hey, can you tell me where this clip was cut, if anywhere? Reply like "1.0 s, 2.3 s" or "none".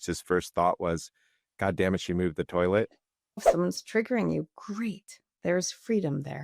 3.5 s